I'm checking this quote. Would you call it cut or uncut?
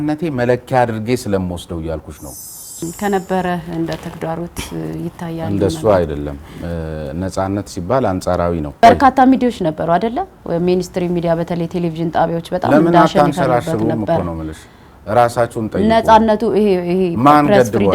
cut